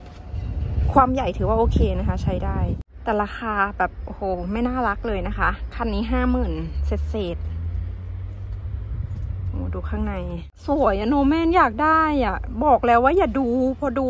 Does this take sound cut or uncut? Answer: cut